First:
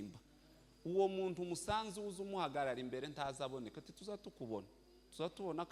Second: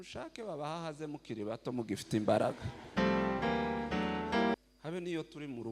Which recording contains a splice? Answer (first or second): second